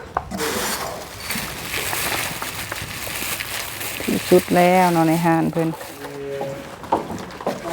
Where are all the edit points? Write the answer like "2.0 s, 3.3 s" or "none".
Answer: 5.9 s